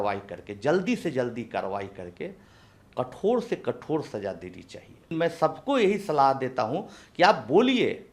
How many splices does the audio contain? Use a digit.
1